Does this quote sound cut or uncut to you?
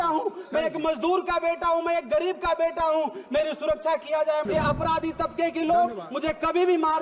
cut